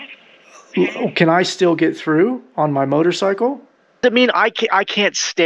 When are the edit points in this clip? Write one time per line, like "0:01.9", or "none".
0:04.0

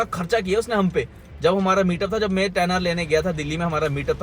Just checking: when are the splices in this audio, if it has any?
none

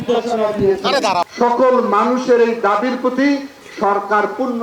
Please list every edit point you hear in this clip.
0:01.3

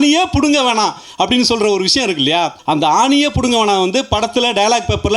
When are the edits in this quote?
0:02.6

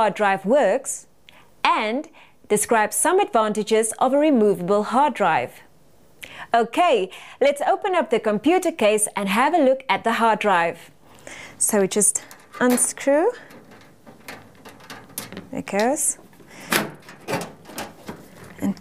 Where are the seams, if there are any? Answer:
0:09.5

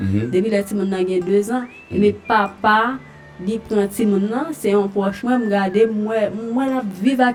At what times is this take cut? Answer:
none

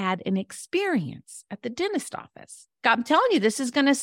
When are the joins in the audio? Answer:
0:02.8

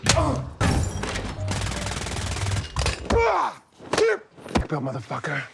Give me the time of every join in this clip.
none

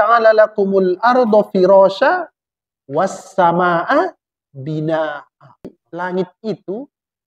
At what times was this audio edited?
0:05.8

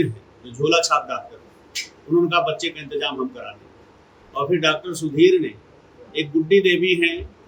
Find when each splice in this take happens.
none

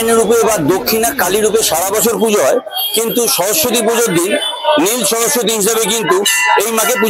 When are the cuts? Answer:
none

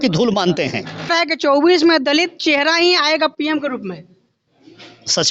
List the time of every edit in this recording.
0:01.1

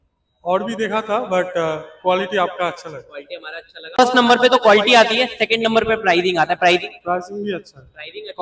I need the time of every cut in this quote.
0:04.0

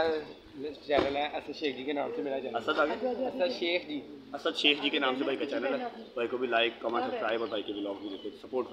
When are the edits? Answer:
none

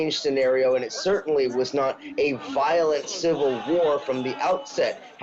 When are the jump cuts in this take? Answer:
none

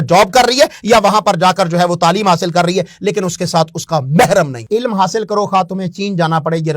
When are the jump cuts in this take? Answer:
0:04.6

